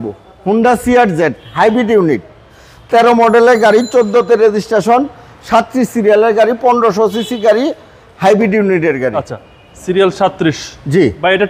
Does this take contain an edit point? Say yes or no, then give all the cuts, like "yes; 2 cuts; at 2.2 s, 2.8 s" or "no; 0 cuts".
no; 0 cuts